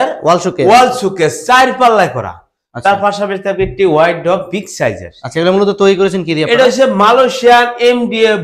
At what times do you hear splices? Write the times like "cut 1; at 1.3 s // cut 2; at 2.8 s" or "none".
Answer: none